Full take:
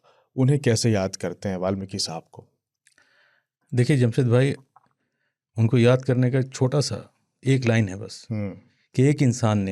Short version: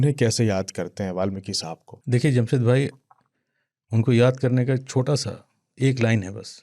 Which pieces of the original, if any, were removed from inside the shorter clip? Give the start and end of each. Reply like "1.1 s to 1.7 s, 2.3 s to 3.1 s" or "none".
2.4 s to 3.6 s